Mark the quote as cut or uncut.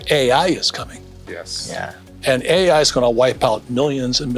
uncut